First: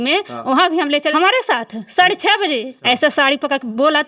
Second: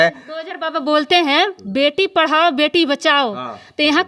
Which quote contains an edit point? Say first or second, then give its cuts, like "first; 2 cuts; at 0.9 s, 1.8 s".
first; 2 cuts; at 1.1 s, 2.7 s